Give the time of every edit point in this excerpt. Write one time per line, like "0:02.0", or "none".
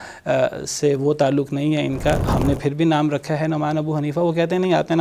0:02.3